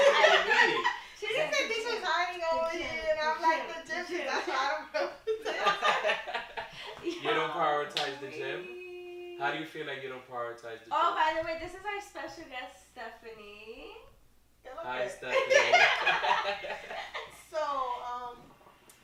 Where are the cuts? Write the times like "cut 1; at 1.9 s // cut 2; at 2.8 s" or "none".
none